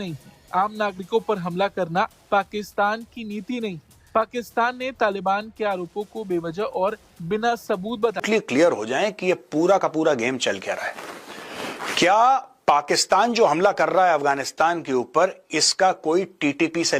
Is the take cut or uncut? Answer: cut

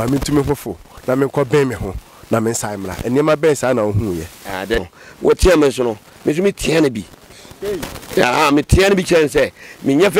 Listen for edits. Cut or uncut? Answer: cut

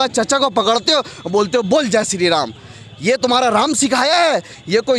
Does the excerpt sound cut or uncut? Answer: uncut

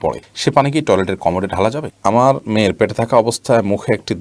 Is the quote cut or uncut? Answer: cut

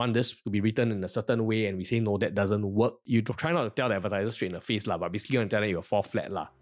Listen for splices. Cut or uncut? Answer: uncut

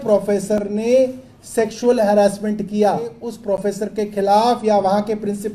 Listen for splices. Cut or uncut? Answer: cut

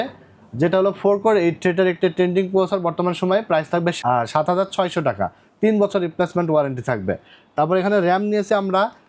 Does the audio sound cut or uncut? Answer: uncut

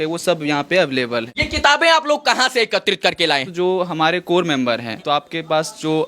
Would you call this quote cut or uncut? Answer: cut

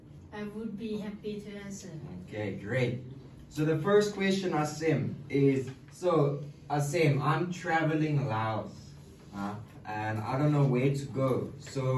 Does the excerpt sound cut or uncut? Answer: cut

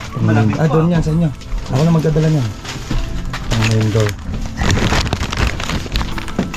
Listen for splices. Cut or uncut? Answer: uncut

